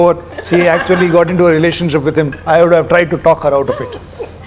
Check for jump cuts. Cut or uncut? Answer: uncut